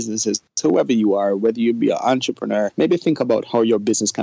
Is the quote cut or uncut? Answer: cut